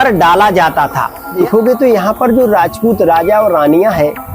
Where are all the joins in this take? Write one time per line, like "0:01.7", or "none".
0:01.3

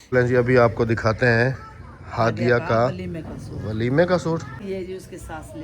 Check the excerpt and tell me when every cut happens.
0:04.5

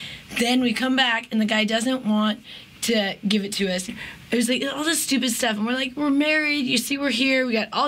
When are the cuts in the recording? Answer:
0:03.9

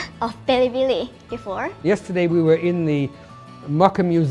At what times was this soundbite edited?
0:01.7

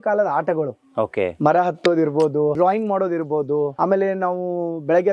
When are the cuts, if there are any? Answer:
0:02.6
0:03.7

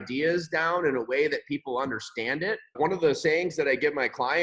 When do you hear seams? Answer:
0:02.7

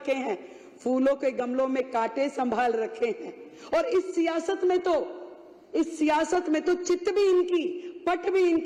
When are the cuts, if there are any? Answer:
none

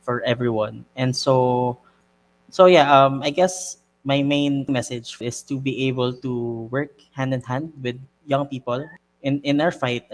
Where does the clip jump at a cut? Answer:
0:04.8
0:08.9

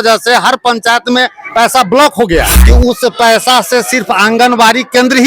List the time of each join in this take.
0:02.5

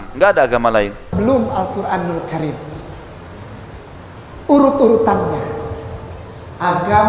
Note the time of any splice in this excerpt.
0:01.1

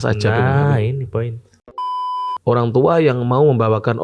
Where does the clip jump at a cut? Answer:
0:01.8

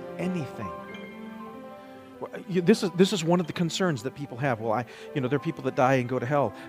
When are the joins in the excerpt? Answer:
none

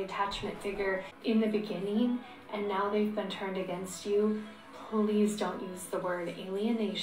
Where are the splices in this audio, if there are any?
0:01.1

